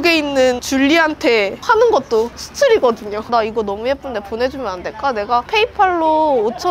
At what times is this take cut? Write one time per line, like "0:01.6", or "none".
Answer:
0:03.2
0:05.5